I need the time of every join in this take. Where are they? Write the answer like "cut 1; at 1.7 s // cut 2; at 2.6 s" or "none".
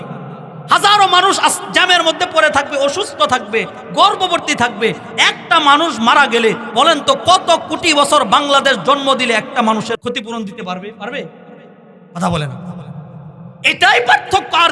cut 1; at 10.0 s